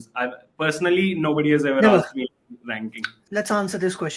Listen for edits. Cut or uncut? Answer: cut